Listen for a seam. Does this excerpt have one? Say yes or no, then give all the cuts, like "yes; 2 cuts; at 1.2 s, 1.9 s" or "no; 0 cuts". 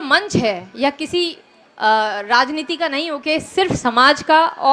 no; 0 cuts